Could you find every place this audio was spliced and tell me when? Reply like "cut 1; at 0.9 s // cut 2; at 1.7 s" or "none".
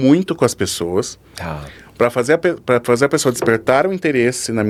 none